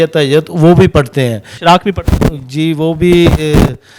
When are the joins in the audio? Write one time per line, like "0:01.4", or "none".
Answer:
0:01.5